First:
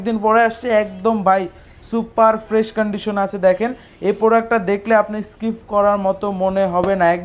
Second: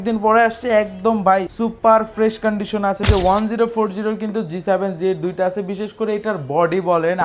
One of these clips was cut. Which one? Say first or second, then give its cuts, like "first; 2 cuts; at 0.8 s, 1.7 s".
second; 2 cuts; at 1.5 s, 3.0 s